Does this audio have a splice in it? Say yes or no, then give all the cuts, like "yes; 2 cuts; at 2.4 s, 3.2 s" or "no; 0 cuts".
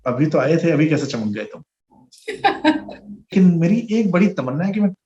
yes; 1 cut; at 3.3 s